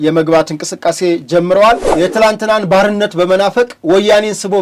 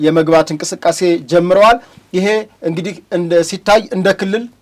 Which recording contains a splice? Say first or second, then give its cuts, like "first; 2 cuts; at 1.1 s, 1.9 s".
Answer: first; 1 cut; at 1.9 s